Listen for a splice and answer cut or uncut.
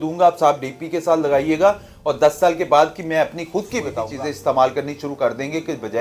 cut